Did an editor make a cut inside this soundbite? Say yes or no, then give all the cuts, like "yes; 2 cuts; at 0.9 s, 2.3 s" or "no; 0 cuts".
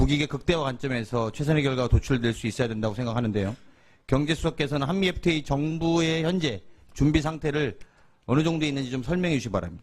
yes; 1 cut; at 6.3 s